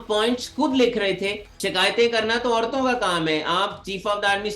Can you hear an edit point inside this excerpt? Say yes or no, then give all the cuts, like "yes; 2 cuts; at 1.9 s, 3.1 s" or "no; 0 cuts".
yes; 1 cut; at 1.5 s